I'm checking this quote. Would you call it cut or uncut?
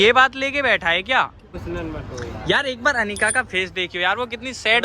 cut